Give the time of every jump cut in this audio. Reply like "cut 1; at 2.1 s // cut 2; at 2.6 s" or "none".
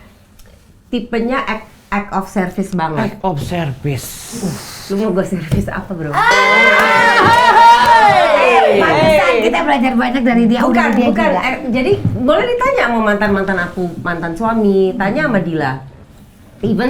none

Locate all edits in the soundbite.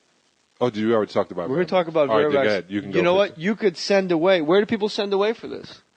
cut 1; at 1.9 s

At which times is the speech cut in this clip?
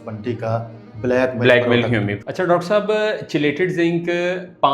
cut 1; at 2.1 s

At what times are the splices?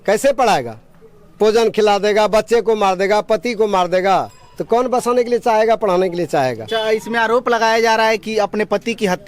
none

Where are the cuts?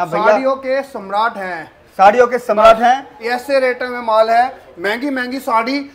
none

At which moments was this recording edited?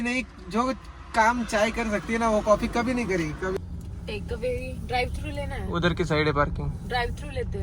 cut 1; at 3.5 s

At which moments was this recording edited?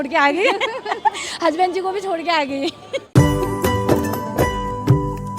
cut 1; at 3.1 s

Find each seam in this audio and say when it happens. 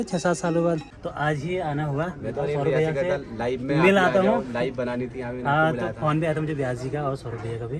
cut 1; at 0.9 s

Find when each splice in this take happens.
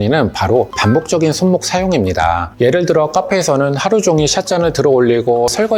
none

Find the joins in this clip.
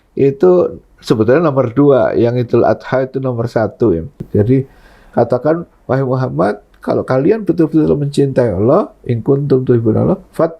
cut 1; at 4.2 s

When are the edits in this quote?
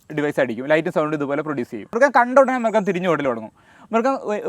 cut 1; at 1.9 s

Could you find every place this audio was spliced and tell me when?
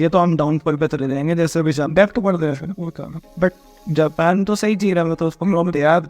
none

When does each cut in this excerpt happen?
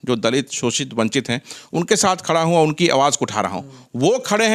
none

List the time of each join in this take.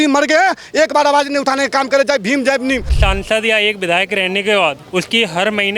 cut 1; at 2.9 s // cut 2; at 4.8 s

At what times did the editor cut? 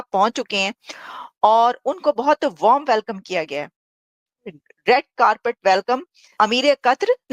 cut 1; at 6.2 s

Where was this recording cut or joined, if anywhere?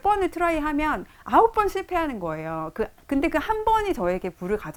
none

